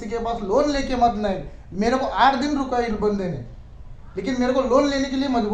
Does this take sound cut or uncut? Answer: uncut